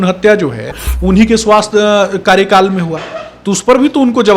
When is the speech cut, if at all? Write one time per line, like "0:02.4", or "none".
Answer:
none